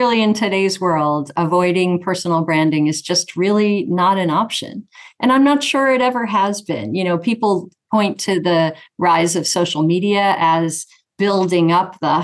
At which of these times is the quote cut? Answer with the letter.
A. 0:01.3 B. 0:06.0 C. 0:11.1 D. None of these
A